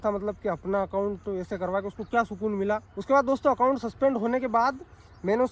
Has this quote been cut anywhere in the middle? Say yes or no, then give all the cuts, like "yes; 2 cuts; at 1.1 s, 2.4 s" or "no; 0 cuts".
no; 0 cuts